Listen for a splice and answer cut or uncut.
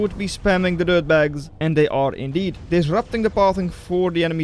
cut